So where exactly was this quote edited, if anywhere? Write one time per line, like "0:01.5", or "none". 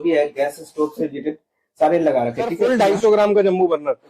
0:02.6